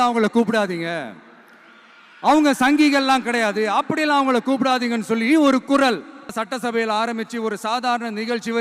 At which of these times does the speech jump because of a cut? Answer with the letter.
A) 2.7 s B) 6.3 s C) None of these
B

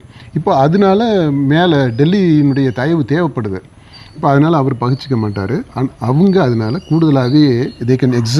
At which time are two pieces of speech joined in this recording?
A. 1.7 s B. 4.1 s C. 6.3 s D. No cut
D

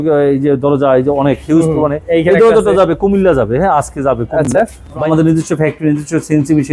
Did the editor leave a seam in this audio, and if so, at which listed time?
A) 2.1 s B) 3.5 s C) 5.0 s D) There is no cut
C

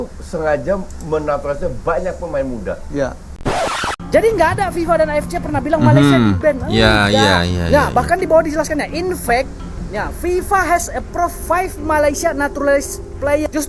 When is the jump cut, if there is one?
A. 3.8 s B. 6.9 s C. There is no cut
A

